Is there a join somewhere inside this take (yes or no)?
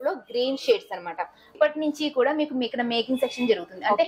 yes